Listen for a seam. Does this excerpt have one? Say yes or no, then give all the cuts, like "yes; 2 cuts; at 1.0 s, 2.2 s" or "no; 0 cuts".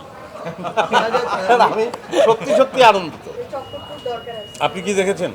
yes; 1 cut; at 3.5 s